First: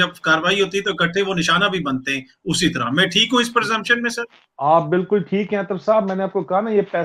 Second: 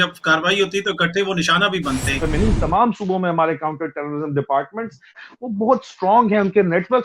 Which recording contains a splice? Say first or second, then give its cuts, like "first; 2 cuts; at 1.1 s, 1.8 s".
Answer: second; 2 cuts; at 2.2 s, 5.2 s